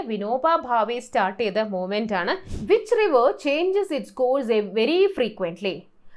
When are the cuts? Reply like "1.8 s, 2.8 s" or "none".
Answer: 2.5 s

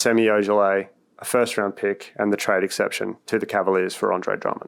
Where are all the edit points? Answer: none

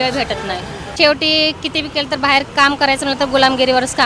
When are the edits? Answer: 0.9 s

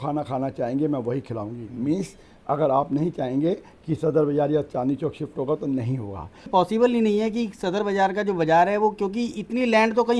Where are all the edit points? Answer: 6.5 s

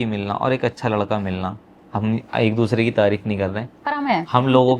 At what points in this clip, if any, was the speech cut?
none

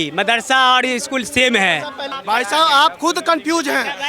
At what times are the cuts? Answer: 2.1 s

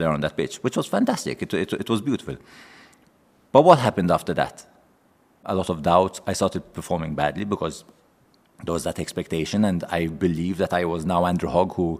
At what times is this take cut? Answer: 5.5 s

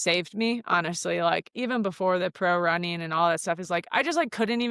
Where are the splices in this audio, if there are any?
none

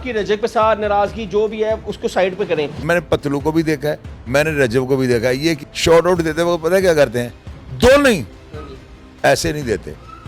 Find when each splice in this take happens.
2.8 s, 5.7 s

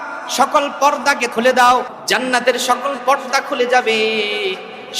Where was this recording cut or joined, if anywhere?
1.3 s, 1.9 s

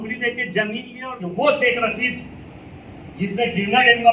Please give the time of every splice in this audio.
0.9 s

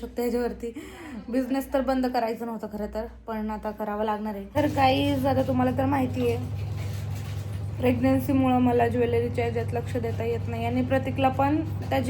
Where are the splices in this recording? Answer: 4.4 s

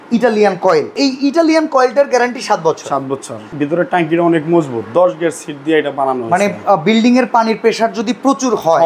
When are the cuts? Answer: 0.9 s, 3.5 s

